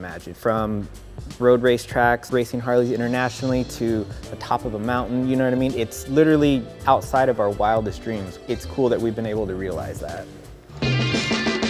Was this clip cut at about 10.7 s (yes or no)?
yes